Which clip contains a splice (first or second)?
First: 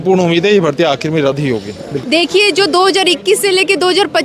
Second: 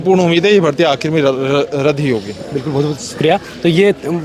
first